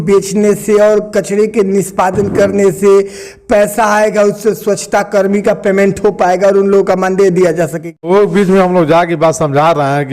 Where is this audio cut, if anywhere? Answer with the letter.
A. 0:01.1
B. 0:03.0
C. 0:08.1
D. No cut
C